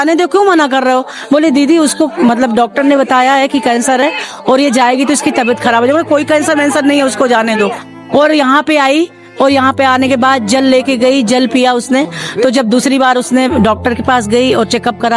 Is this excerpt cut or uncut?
uncut